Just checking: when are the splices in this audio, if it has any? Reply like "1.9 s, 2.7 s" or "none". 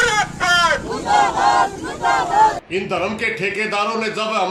2.6 s